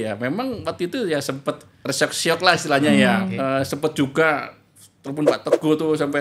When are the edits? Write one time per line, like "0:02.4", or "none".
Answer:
0:01.7
0:03.3